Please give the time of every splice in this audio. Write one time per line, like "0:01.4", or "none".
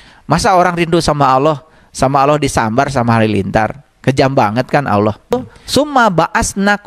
0:05.3